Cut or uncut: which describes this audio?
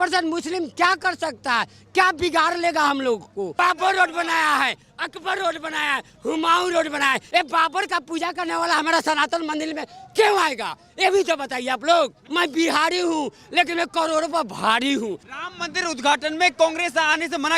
cut